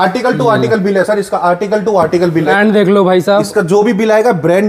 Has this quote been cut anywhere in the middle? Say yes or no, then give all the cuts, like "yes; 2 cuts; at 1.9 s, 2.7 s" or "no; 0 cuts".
yes; 1 cut; at 2.5 s